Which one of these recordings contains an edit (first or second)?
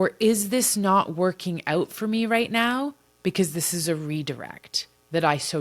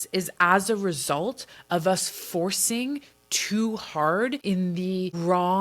second